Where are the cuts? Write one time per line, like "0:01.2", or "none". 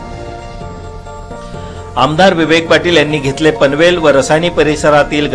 0:01.2